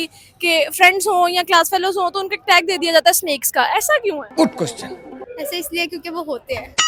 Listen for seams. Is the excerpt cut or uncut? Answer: uncut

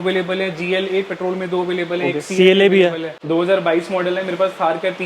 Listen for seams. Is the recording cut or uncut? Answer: cut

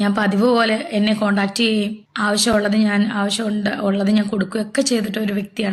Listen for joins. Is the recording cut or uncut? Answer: uncut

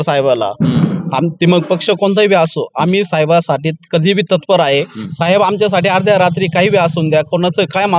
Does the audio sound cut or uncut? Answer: uncut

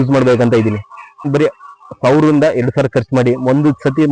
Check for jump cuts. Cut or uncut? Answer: cut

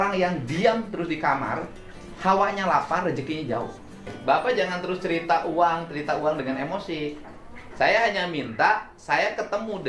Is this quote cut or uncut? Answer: cut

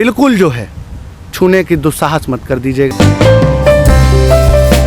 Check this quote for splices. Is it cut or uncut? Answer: cut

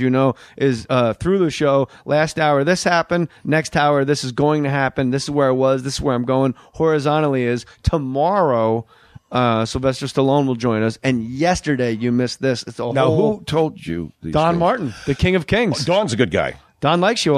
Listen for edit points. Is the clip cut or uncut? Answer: cut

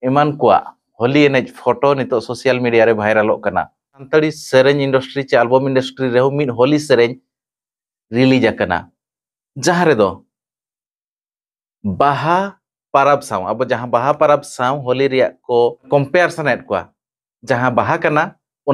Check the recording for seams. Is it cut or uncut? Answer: cut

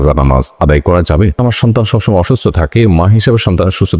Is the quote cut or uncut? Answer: cut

